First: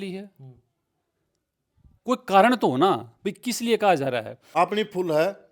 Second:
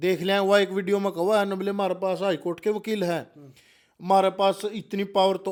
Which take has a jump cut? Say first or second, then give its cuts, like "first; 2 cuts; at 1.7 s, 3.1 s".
first; 1 cut; at 4.4 s